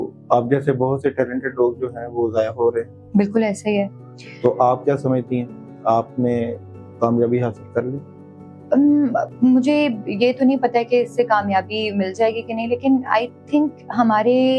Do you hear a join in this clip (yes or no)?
no